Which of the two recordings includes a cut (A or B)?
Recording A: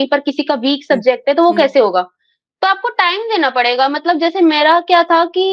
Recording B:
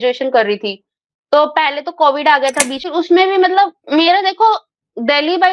B